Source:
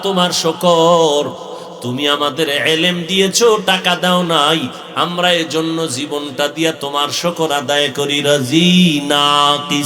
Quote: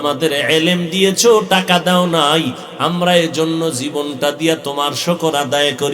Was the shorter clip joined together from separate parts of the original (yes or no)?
no